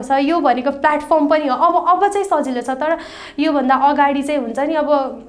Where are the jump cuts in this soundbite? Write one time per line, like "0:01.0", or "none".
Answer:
none